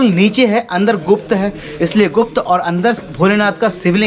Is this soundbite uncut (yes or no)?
yes